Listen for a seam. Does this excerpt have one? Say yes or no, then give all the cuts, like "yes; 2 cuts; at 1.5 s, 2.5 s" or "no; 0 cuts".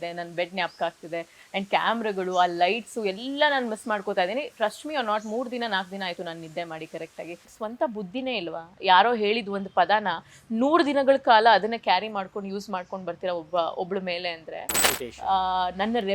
yes; 2 cuts; at 7.5 s, 14.9 s